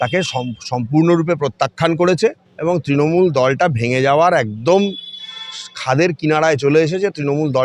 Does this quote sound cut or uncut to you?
uncut